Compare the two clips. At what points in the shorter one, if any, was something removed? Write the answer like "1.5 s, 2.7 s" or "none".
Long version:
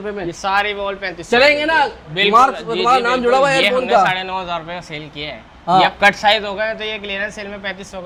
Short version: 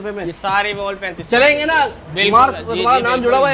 none